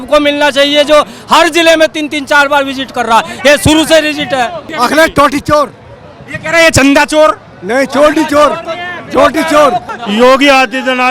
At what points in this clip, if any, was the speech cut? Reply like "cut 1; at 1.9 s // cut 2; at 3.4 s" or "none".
cut 1; at 4.7 s // cut 2; at 9.9 s